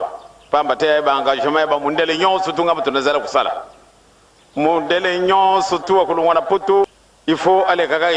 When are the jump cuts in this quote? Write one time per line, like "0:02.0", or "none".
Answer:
0:07.0